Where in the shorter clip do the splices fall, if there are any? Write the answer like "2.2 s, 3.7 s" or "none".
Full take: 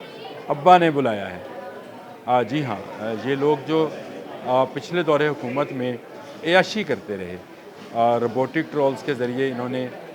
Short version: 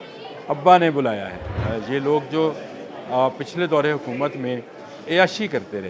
1.5 s